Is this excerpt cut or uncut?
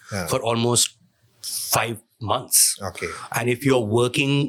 uncut